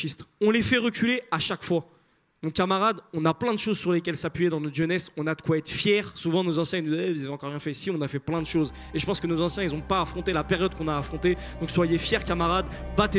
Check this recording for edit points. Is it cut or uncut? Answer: uncut